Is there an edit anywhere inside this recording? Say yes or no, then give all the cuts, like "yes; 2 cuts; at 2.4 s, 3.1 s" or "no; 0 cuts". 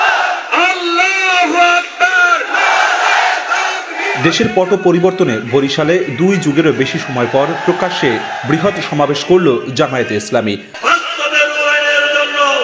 no; 0 cuts